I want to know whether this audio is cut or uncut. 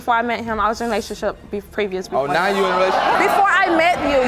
cut